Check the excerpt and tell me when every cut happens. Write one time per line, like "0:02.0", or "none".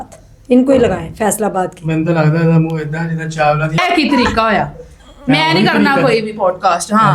0:03.8